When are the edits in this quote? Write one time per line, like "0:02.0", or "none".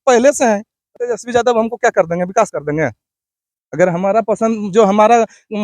0:01.0